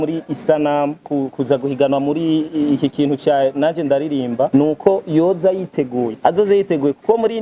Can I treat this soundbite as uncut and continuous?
no; 3 cuts; at 1.1 s, 4.5 s, 6.1 s

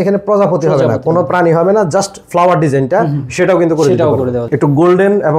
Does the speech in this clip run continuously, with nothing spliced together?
no; 1 cut; at 4.5 s

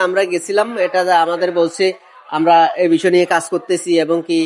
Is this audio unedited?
yes; 0 cuts

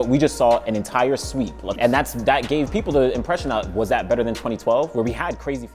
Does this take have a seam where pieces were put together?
yes; 1 cut; at 1.7 s

